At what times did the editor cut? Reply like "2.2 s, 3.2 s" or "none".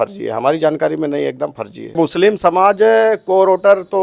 2.0 s